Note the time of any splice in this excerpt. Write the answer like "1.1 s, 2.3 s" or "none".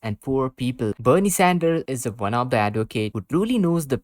0.9 s